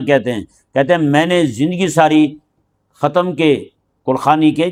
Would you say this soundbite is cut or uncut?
uncut